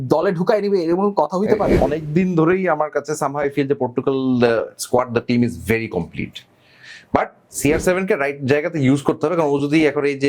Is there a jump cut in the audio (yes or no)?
yes